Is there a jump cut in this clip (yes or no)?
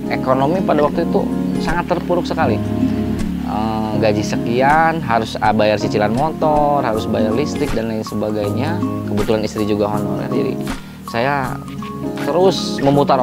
no